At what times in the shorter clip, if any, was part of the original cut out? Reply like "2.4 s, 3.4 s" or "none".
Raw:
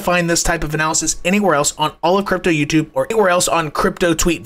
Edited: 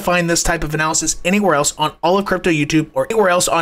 none